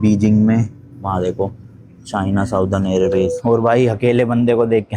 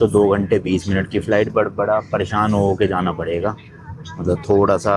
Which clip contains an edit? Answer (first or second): first